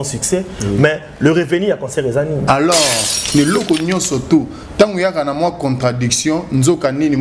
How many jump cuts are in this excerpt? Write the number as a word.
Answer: one